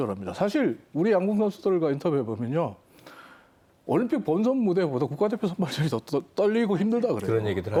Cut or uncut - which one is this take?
uncut